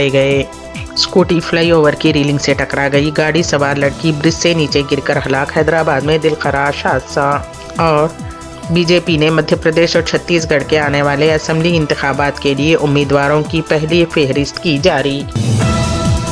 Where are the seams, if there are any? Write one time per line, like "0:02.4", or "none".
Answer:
0:15.4